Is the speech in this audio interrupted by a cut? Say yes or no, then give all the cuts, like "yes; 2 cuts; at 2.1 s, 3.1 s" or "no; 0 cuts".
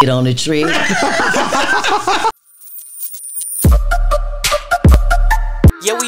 yes; 1 cut; at 2.3 s